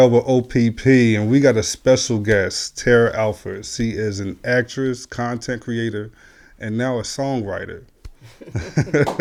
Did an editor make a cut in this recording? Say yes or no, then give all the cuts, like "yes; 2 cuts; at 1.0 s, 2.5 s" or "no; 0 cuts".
no; 0 cuts